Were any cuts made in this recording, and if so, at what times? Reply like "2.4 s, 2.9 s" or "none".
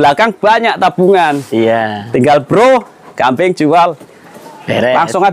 none